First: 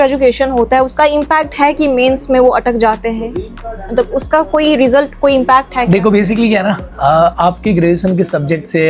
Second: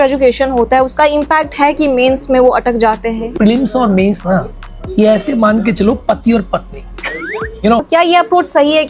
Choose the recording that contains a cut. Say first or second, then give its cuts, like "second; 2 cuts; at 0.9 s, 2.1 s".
second; 2 cuts; at 3.3 s, 7.8 s